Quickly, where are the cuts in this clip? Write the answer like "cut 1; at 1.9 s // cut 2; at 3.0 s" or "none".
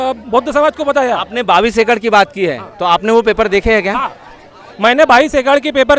none